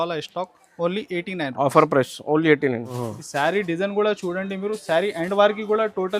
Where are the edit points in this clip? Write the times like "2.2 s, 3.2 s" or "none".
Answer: 3.0 s